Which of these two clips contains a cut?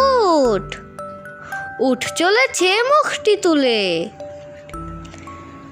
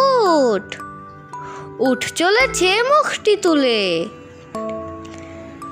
first; 1 cut; at 4.1 s

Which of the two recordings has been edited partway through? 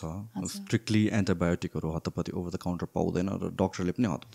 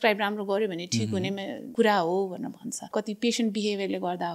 second; 2 cuts; at 1.6 s, 2.8 s

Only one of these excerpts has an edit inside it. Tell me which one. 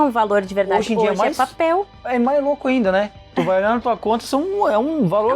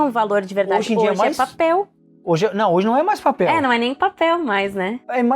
first; 1 cut; at 2.0 s

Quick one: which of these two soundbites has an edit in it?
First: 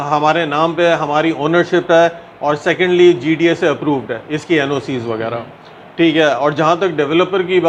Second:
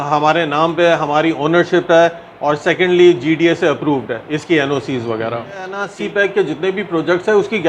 second; 1 cut; at 5.8 s

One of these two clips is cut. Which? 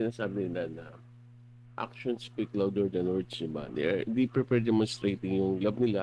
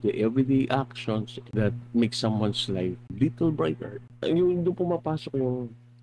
second; 3 cuts; at 1.4 s, 3.1 s, 4.1 s

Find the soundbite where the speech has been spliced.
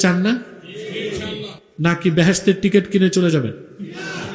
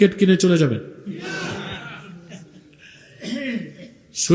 first; 1 cut; at 1.5 s

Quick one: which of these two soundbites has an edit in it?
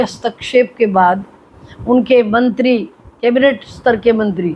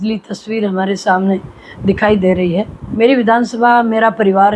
second; 1 cut; at 2.8 s

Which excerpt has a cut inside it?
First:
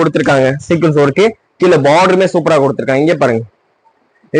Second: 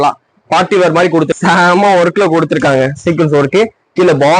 second; 1 cut; at 1.3 s

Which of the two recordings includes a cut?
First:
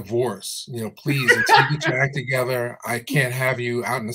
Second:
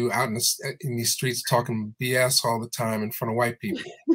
first; 1 cut; at 2.8 s

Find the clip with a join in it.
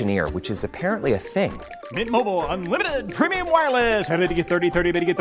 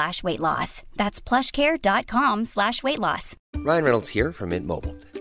second; 1 cut; at 3.5 s

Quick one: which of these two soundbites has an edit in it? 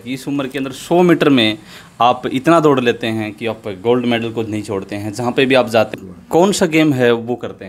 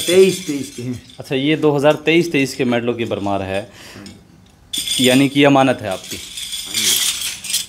first; 1 cut; at 5.9 s

